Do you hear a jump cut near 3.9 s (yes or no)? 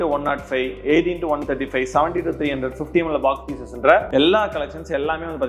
no